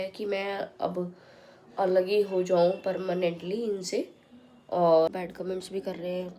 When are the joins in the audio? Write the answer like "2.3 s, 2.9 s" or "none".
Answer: 5.1 s